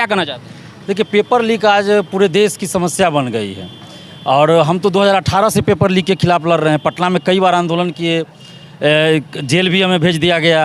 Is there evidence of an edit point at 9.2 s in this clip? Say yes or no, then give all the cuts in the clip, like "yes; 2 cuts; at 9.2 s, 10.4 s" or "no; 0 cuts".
no; 0 cuts